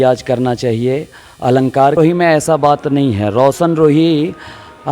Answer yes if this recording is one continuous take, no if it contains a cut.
no